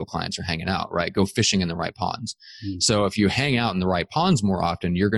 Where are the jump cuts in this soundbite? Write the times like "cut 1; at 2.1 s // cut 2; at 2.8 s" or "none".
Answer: none